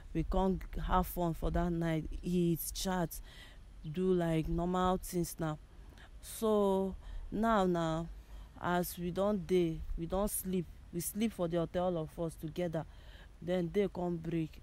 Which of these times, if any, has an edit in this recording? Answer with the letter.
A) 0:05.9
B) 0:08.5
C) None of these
C